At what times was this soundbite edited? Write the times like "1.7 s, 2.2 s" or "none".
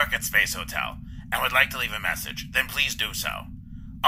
none